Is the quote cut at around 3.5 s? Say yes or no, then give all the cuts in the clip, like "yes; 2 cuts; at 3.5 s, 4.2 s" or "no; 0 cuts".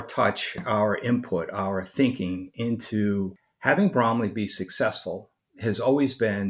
yes; 1 cut; at 3.5 s